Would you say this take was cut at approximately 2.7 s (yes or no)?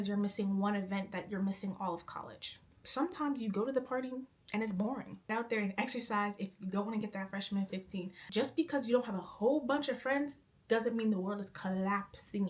yes